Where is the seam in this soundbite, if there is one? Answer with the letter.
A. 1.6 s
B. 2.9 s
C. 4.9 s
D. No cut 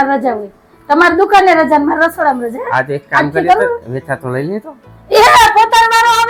D